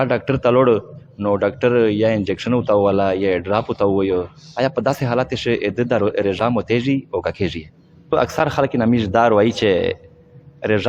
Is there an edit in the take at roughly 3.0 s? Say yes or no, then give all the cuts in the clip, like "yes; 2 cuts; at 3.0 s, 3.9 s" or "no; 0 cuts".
no; 1 cut; at 8.1 s